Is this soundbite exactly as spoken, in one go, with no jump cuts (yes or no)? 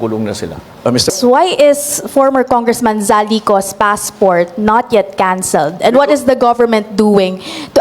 no